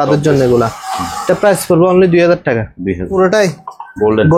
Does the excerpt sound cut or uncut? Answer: cut